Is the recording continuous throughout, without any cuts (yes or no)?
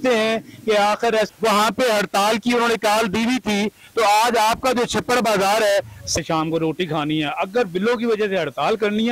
no